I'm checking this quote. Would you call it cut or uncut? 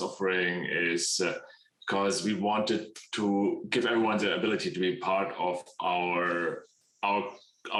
uncut